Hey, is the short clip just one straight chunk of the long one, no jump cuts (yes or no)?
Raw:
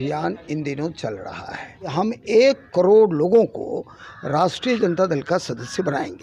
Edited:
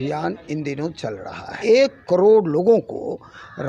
no